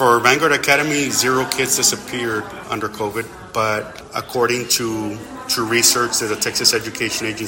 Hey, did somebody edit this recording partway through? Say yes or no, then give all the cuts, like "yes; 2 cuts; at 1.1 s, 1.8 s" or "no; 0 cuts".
yes; 2 cuts; at 2.6 s, 4.0 s